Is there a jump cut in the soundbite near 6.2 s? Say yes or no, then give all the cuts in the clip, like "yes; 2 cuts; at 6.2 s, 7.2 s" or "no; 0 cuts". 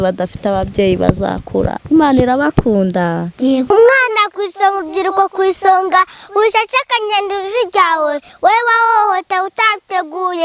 no; 1 cut; at 3.7 s